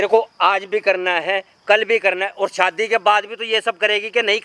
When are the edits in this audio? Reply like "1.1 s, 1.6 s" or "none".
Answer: none